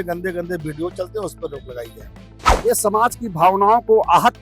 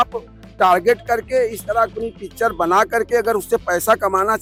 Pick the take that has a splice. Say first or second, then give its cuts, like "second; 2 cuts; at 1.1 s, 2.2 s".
first; 1 cut; at 2.4 s